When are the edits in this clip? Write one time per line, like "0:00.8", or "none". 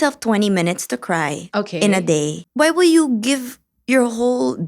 0:02.4